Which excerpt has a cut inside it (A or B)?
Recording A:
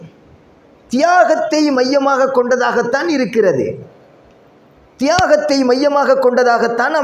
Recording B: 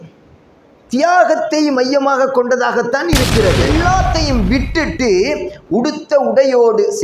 B